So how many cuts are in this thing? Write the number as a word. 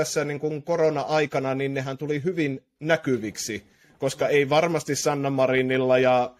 zero